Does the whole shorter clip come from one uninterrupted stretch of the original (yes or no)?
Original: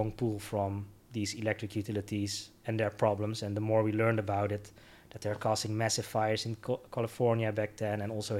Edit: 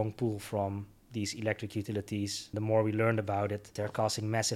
no